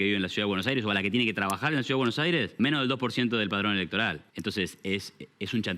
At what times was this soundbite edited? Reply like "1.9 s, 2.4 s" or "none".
2.5 s, 4.2 s